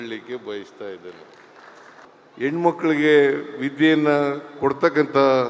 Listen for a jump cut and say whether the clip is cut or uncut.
cut